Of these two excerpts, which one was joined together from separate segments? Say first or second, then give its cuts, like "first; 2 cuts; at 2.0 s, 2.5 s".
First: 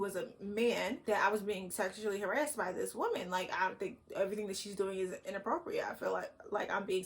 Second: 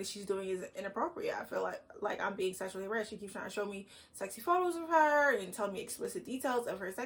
first; 1 cut; at 1.0 s